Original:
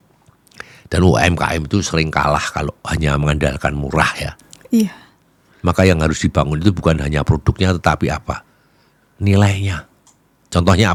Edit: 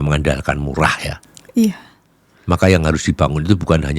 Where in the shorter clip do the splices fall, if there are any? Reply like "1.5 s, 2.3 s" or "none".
none